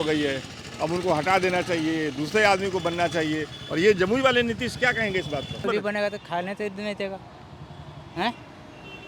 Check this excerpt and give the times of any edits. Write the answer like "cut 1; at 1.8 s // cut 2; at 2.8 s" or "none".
cut 1; at 5.6 s